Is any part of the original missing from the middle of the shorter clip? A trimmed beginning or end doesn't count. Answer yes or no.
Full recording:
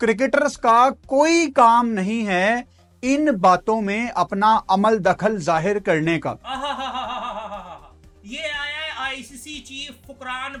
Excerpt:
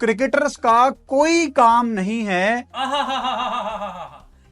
yes